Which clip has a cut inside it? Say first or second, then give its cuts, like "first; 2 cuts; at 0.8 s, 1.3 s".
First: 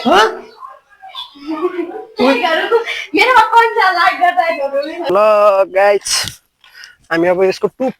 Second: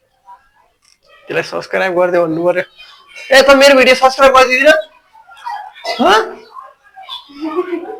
first; 1 cut; at 5.0 s